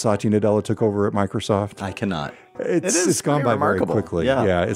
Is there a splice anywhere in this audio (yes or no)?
yes